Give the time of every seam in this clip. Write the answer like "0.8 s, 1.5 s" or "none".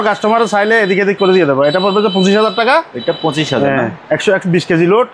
none